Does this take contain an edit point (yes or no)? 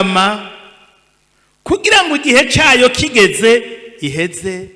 no